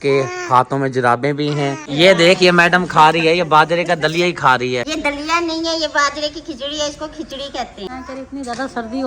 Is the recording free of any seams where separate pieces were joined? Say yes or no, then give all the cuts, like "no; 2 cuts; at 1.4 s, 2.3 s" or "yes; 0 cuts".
no; 3 cuts; at 1.8 s, 4.9 s, 7.9 s